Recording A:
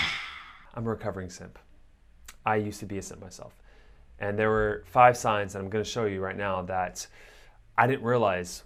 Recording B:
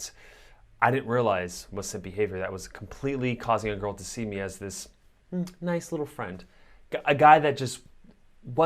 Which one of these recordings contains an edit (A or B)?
B